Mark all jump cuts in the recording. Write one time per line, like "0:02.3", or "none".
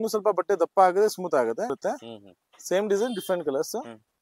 0:01.8

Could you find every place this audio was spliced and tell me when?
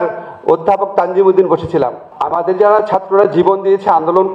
0:02.1

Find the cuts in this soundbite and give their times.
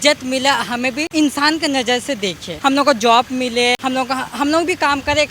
0:01.0
0:02.5
0:03.8

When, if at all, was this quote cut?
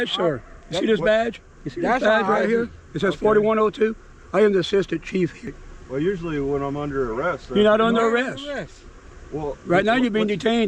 0:05.4

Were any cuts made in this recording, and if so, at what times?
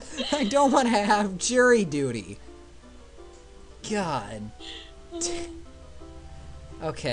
0:05.0

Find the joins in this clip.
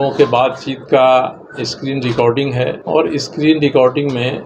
0:02.8

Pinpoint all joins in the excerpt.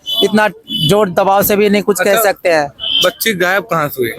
none

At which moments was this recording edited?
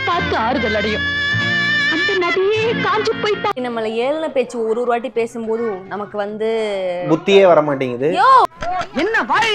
0:03.6
0:08.5

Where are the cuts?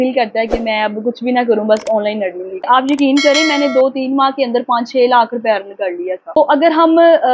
0:02.7
0:06.4

